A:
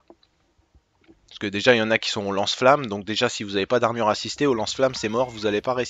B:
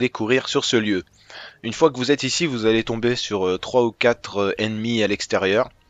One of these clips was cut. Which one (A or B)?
A